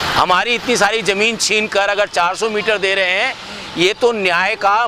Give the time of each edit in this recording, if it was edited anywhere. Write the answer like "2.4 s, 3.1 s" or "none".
none